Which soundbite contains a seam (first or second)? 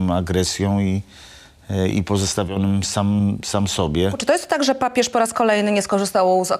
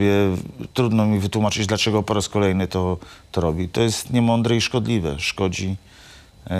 first